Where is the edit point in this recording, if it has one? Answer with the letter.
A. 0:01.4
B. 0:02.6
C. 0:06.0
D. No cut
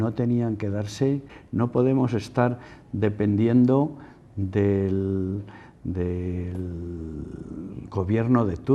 A